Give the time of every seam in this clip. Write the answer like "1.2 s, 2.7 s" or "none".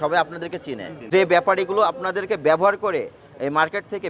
0.9 s